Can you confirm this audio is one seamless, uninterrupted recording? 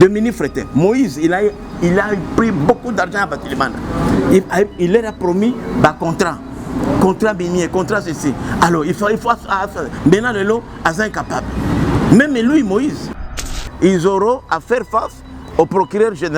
no; 1 cut; at 13.3 s

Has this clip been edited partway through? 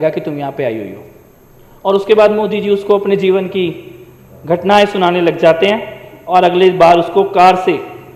no; 0 cuts

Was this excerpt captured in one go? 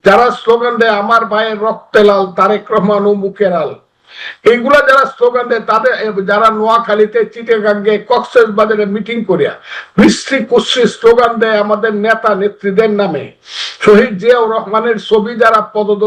yes; 0 cuts

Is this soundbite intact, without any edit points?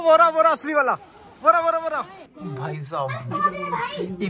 no; 1 cut; at 2.2 s

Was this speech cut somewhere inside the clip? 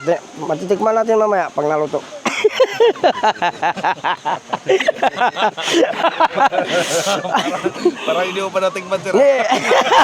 no; 0 cuts

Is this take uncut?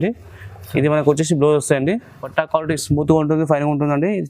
no; 1 cut; at 2.3 s

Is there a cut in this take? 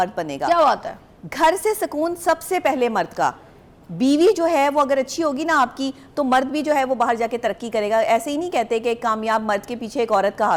no; 0 cuts

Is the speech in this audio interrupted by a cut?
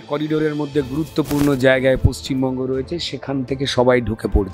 no; 0 cuts

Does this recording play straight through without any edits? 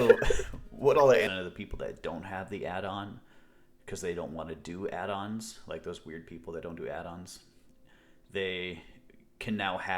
no; 1 cut; at 1.3 s

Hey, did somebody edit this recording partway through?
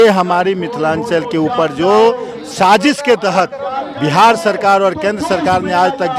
no; 0 cuts

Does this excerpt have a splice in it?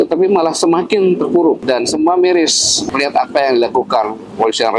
yes; 2 cuts; at 1.6 s, 2.8 s

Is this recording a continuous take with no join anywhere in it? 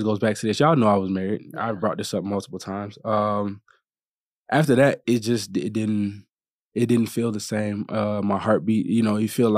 yes; 0 cuts

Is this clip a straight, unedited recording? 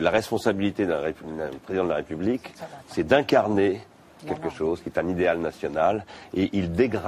no; 1 cut; at 4.9 s

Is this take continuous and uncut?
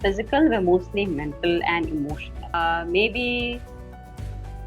no; 1 cut; at 2.5 s

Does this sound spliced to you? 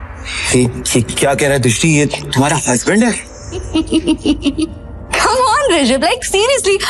yes; 1 cut; at 3.7 s

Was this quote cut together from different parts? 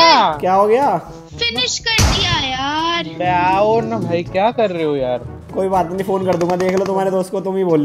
no; 0 cuts

